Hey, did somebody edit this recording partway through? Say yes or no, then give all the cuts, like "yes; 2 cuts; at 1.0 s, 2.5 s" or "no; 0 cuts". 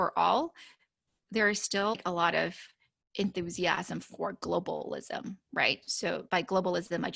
yes; 1 cut; at 2.0 s